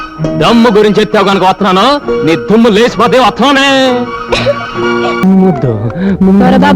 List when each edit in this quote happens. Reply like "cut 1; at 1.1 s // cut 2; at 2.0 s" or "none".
cut 1; at 5.2 s